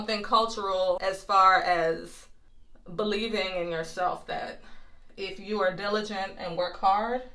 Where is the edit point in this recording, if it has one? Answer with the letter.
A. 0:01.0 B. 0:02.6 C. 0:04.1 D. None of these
A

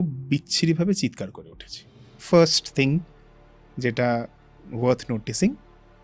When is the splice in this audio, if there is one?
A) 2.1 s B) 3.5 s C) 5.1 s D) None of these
A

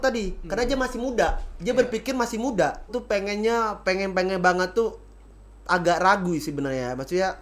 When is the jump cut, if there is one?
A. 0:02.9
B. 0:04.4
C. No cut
A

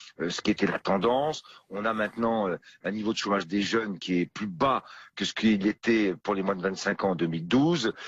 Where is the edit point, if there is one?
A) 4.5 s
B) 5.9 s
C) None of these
B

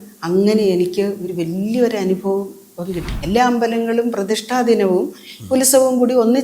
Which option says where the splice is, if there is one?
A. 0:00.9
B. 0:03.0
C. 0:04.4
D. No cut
B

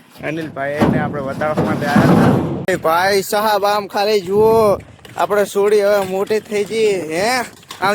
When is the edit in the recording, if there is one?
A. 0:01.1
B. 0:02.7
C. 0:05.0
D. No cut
B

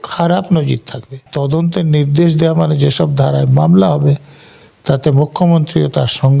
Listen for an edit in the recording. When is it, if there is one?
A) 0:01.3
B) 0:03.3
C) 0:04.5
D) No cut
A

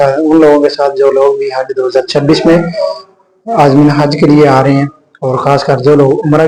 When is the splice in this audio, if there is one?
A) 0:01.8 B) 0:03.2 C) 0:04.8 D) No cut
D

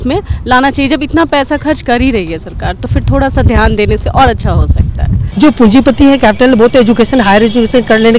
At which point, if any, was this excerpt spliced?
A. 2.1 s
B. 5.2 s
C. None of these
B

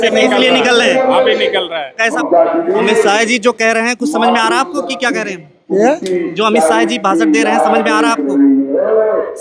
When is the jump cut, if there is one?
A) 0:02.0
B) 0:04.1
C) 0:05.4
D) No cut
A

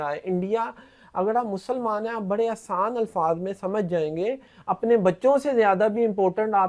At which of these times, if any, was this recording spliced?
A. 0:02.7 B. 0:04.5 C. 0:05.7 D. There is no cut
B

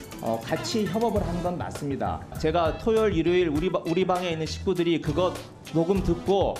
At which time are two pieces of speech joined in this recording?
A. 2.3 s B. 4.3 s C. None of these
A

